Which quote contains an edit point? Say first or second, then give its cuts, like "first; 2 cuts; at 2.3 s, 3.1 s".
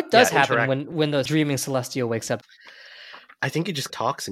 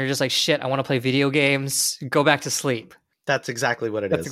first; 2 cuts; at 0.9 s, 2.4 s